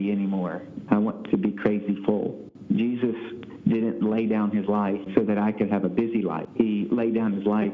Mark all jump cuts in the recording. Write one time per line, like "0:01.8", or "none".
0:02.5
0:05.1
0:06.4